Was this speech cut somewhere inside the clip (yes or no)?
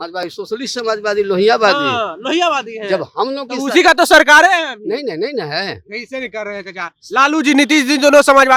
no